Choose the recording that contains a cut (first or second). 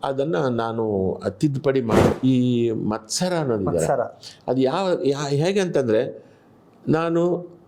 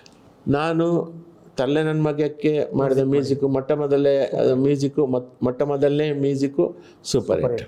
first